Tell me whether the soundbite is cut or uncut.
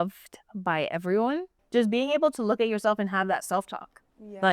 cut